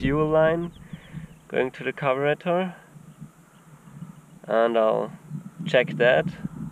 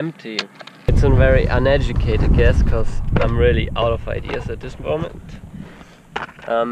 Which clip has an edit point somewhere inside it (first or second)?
second